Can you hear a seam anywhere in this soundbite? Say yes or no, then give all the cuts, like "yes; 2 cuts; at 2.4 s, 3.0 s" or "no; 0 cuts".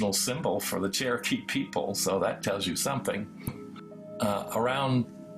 yes; 1 cut; at 3.5 s